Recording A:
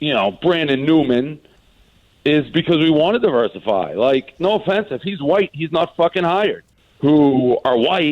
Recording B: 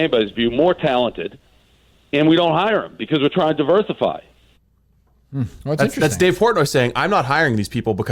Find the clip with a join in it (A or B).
A